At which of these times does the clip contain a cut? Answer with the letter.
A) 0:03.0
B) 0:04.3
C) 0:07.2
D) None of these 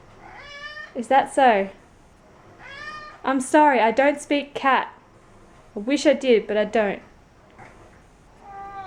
D